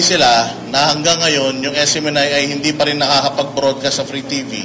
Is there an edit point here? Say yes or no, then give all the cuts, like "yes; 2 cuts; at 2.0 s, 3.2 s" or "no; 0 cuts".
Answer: no; 0 cuts